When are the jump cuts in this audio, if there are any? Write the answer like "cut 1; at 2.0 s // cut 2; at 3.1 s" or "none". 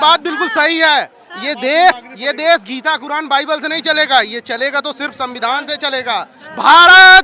none